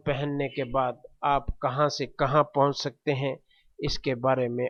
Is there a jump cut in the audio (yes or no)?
no